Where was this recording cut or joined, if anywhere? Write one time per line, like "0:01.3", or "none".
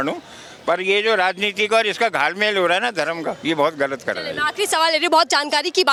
none